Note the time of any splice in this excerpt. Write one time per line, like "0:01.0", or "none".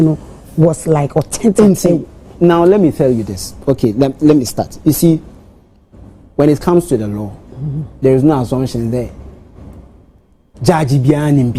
none